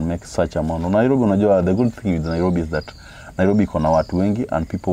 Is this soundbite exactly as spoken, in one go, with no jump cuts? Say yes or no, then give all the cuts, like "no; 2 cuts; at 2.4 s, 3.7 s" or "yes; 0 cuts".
yes; 0 cuts